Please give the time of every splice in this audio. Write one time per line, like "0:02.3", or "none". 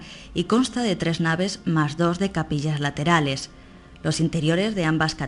none